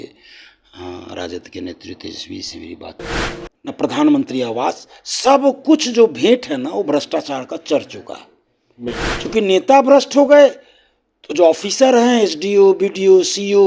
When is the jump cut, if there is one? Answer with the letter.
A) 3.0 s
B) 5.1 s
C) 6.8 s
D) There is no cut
A